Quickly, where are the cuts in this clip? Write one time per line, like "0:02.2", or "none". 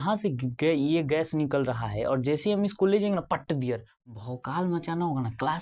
0:03.9